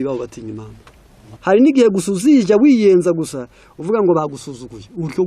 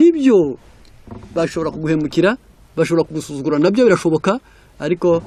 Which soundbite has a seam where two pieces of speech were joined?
first; 1 cut; at 1.3 s

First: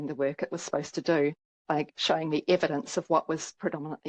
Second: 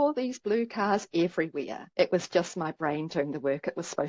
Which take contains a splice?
second; 1 cut; at 1.9 s

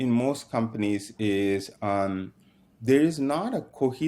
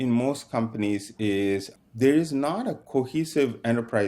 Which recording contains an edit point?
second; 1 cut; at 1.7 s

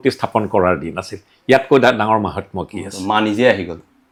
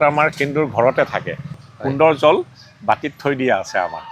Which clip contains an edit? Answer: second; 1 cut; at 1.6 s

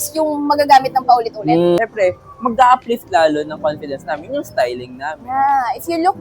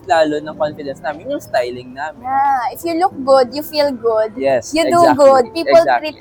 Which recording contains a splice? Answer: first; 1 cut; at 1.8 s

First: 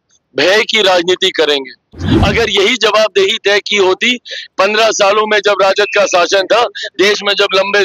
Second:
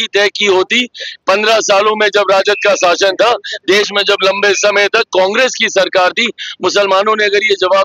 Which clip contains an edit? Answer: first; 1 cut; at 1.9 s

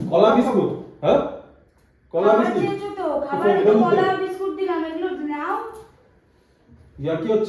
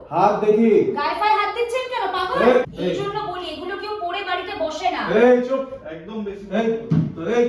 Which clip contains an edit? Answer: second; 1 cut; at 2.7 s

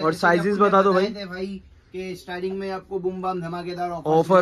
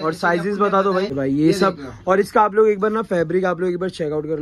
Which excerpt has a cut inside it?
second; 1 cut; at 1.1 s

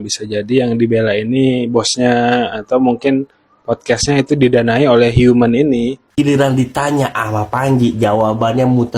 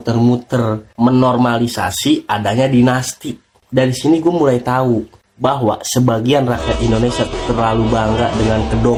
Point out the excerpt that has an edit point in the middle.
first; 1 cut; at 6.0 s

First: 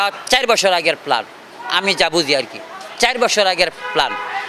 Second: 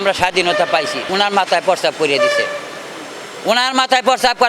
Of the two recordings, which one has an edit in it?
second; 1 cut; at 1.0 s

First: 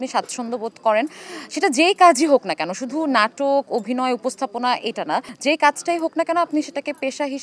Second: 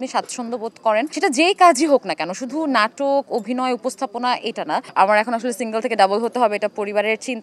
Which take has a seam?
second; 2 cuts; at 1.1 s, 4.9 s

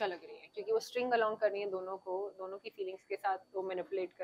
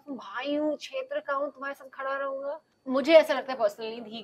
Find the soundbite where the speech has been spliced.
second; 1 cut; at 2.7 s

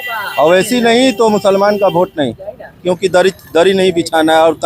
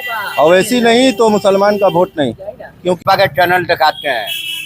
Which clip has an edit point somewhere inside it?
second; 1 cut; at 3.0 s

